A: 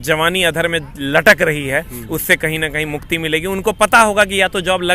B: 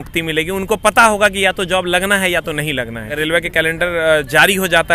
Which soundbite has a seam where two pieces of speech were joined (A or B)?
B